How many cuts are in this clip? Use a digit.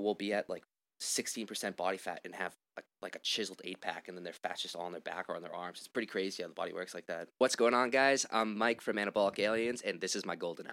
1